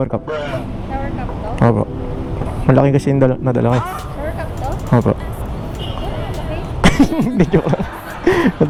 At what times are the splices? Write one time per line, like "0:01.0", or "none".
none